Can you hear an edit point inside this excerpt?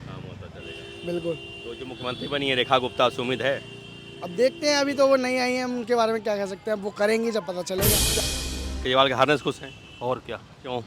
yes; 1 cut; at 8.2 s

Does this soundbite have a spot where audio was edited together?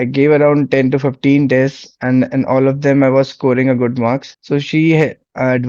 yes; 1 cut; at 4.3 s

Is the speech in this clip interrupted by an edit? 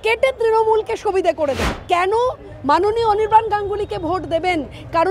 yes; 1 cut; at 1.7 s

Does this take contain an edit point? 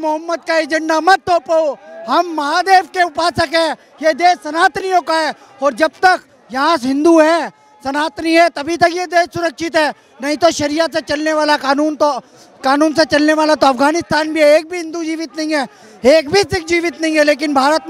no; 0 cuts

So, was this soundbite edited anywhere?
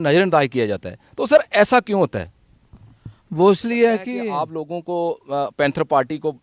yes; 1 cut; at 4.2 s

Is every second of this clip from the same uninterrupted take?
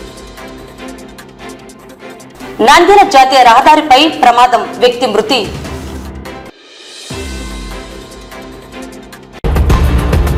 yes; 0 cuts

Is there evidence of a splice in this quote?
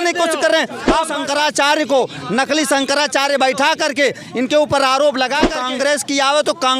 yes; 2 cuts; at 1.1 s, 5.6 s

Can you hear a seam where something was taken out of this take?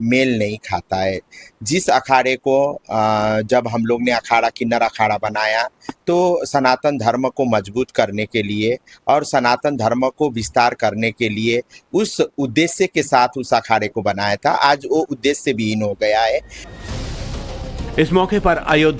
yes; 1 cut; at 13.4 s

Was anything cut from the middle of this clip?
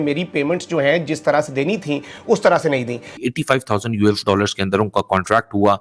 yes; 1 cut; at 3.2 s

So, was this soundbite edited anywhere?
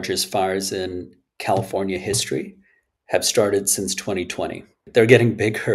yes; 1 cut; at 4.8 s

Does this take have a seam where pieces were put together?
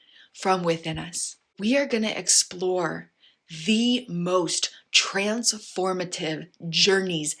yes; 1 cut; at 1.5 s

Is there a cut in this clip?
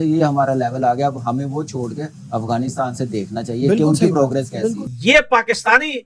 yes; 1 cut; at 4.9 s

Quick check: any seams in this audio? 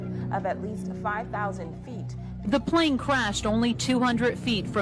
no; 0 cuts

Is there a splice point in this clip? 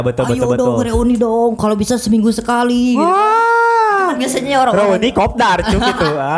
no; 0 cuts

